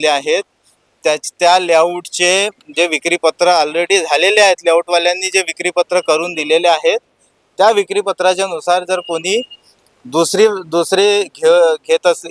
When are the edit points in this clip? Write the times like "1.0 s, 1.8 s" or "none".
none